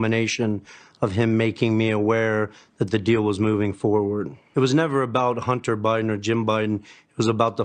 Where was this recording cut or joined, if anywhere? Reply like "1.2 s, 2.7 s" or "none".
4.4 s